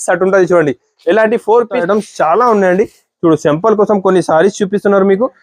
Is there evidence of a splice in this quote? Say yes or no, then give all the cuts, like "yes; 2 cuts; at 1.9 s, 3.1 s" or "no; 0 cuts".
yes; 1 cut; at 1.8 s